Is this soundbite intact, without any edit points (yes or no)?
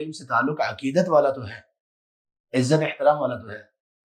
yes